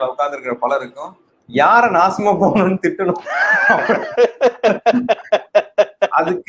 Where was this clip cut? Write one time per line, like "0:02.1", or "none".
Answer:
none